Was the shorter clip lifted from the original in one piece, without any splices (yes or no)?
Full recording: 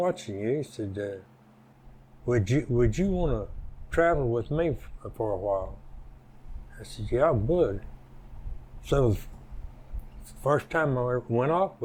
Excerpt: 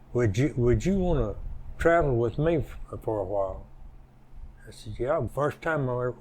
no